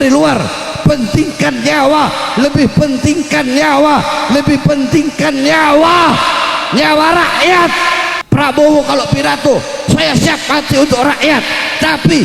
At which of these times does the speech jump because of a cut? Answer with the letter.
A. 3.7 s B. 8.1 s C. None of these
B